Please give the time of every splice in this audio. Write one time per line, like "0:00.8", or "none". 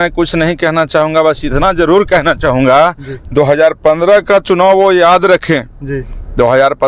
none